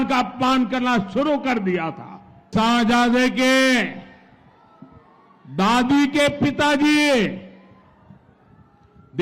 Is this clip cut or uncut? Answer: cut